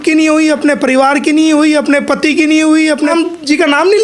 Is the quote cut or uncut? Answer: cut